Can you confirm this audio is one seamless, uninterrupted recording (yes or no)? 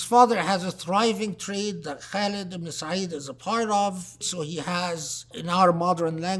no